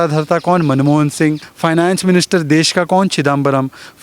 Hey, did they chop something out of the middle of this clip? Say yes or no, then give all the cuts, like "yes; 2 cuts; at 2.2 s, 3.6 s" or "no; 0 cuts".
yes; 1 cut; at 1.5 s